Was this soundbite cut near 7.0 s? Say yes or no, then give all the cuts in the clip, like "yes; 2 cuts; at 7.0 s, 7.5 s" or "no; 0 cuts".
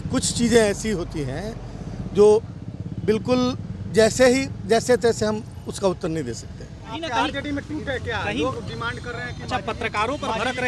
yes; 1 cut; at 7.0 s